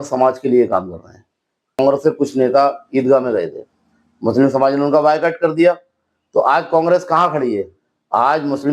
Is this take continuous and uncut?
no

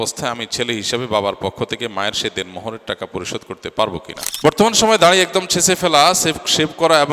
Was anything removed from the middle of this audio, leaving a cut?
yes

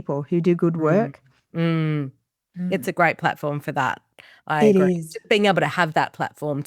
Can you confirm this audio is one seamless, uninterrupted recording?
no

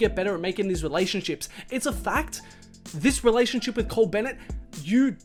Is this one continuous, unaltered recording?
yes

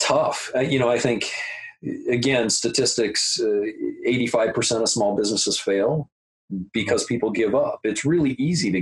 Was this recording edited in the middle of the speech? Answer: no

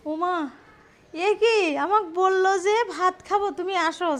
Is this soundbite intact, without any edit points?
yes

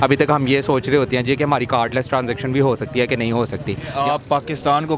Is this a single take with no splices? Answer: no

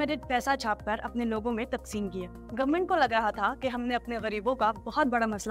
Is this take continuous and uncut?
yes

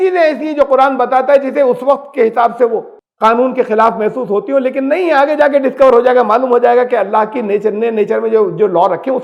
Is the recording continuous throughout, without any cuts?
yes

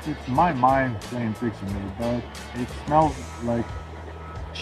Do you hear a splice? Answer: no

